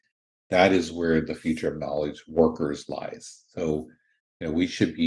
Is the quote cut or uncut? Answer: uncut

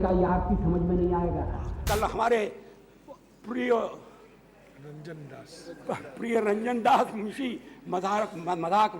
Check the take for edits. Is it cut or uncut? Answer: cut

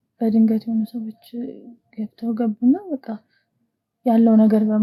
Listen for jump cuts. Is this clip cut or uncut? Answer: uncut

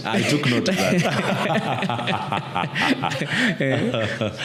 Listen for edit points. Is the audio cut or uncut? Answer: uncut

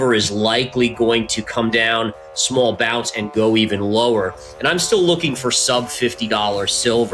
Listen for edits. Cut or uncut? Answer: uncut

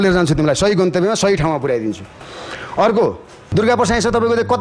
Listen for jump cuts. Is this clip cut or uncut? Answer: cut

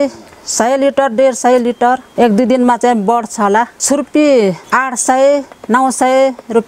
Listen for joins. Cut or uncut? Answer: cut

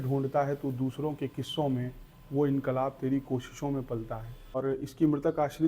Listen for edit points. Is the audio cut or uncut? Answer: cut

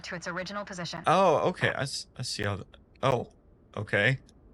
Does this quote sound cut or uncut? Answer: cut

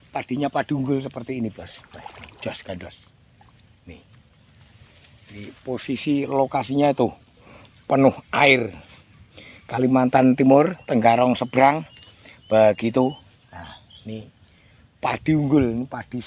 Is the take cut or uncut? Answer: uncut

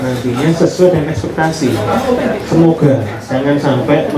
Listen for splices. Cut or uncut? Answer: uncut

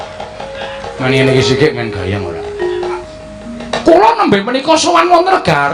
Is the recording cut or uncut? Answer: cut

